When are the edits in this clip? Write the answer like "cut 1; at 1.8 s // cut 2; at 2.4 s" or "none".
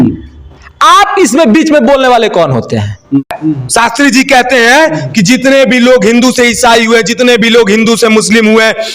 cut 1; at 3.2 s